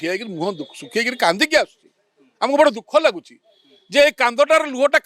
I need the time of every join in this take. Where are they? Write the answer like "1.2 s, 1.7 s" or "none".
none